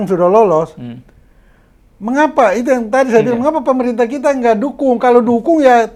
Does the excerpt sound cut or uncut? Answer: uncut